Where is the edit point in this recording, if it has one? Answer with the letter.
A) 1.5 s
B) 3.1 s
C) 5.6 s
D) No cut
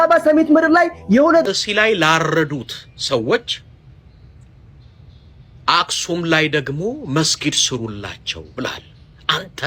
A